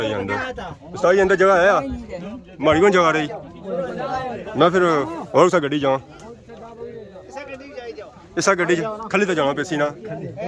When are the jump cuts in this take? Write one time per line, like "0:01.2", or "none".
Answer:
none